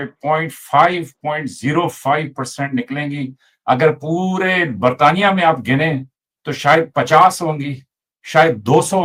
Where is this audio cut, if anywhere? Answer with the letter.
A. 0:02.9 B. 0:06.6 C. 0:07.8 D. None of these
D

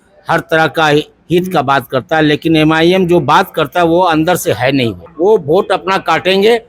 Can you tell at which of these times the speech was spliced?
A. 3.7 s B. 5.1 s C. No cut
B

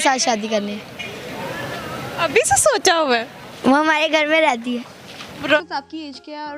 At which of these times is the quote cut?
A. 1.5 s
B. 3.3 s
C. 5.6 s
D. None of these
C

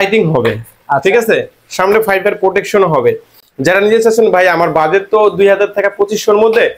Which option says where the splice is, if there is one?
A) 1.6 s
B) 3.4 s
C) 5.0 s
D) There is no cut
D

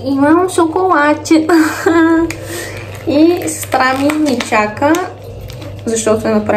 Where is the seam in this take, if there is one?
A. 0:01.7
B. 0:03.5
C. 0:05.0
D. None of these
D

